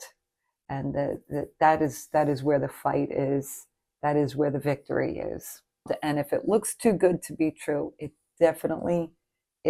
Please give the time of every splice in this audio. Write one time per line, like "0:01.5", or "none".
0:05.8